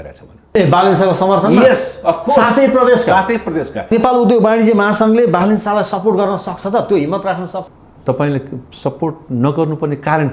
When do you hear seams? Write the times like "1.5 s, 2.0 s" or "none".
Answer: 3.9 s, 7.6 s